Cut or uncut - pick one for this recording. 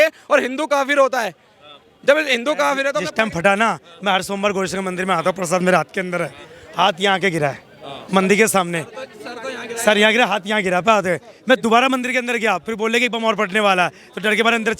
cut